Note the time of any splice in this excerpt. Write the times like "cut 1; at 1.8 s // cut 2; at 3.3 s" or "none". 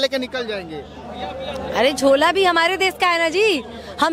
none